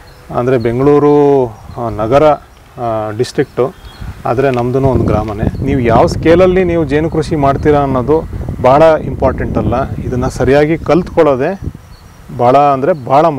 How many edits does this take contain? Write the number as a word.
one